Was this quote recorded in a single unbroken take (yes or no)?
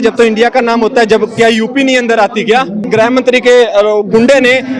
no